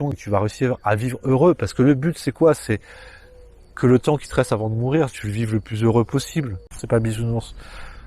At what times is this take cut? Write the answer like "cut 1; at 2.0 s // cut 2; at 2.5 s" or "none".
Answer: cut 1; at 6.8 s